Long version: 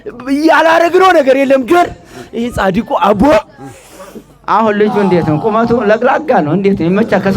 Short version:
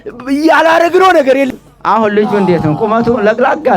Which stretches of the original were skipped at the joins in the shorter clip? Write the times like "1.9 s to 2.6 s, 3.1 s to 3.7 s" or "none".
1.5 s to 4.1 s